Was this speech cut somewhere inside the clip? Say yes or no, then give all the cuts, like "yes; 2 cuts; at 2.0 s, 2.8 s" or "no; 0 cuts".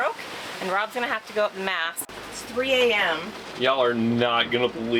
yes; 1 cut; at 2.0 s